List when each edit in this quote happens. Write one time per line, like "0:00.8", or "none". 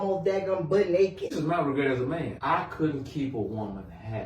0:01.4
0:02.4